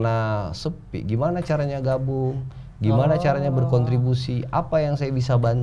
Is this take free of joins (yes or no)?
yes